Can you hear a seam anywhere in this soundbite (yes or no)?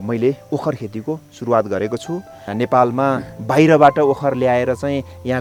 yes